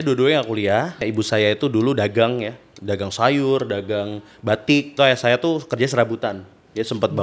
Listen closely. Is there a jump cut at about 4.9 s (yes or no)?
yes